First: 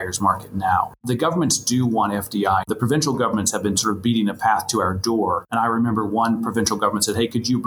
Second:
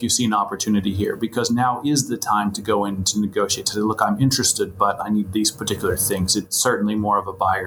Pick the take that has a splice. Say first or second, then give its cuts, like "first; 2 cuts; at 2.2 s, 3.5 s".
first; 3 cuts; at 1.0 s, 2.6 s, 5.4 s